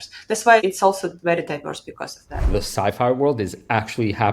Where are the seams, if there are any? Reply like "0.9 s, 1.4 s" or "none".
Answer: 2.5 s